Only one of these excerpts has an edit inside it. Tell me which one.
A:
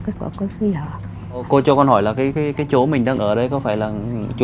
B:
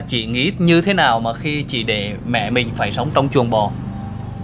A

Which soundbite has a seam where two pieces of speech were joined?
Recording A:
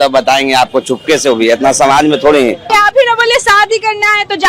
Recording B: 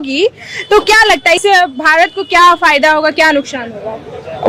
A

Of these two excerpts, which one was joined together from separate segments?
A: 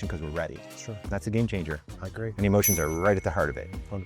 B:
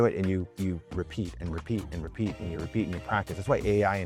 A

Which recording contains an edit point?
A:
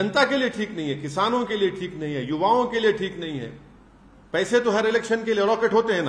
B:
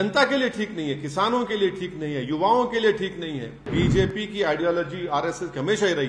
B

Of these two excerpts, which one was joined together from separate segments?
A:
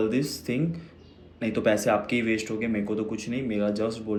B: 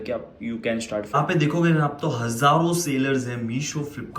B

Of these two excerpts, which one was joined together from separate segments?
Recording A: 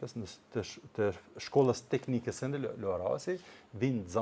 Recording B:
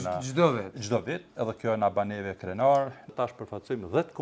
B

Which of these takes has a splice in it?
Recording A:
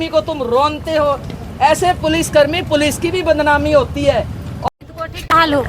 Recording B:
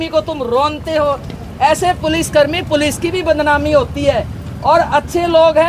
A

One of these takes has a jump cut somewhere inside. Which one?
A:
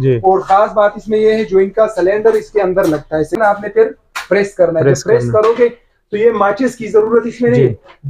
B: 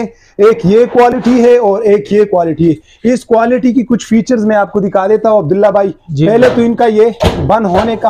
A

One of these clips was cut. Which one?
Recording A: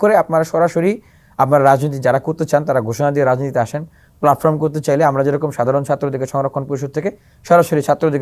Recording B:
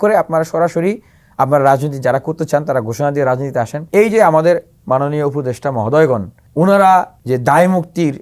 B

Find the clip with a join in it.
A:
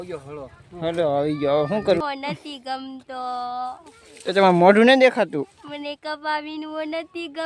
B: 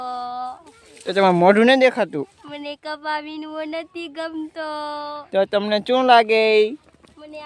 A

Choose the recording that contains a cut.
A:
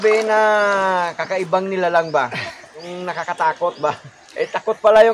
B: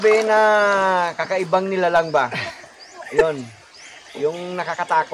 A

